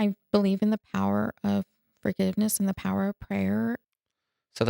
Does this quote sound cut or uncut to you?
cut